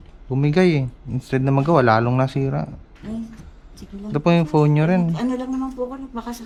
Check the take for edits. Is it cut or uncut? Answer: uncut